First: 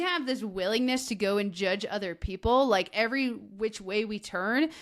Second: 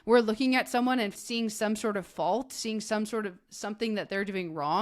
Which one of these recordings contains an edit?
second; 1 cut; at 1.1 s

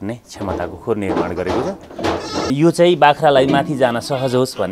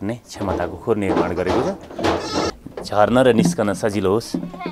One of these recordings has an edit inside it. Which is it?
second; 1 cut; at 2.5 s

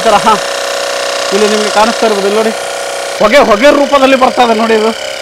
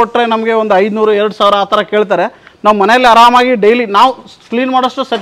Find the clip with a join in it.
first; 1 cut; at 3.0 s

